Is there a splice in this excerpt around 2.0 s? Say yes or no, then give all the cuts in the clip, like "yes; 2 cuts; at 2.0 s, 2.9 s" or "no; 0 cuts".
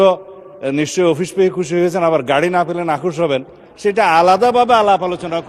no; 1 cut; at 3.6 s